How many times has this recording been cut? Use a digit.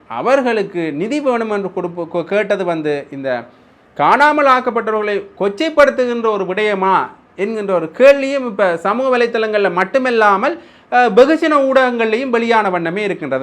0